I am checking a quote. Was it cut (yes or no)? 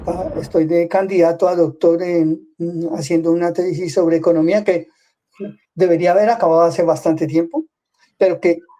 no